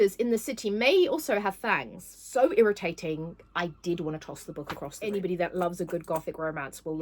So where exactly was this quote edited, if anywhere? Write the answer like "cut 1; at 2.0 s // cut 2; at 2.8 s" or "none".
cut 1; at 2.2 s // cut 2; at 5.0 s